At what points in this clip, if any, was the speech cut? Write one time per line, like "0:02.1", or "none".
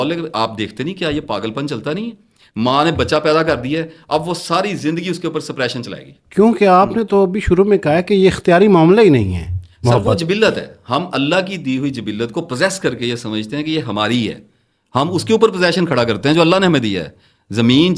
none